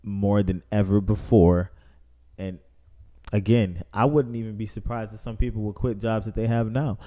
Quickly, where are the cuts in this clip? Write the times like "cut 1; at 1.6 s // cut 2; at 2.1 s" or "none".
none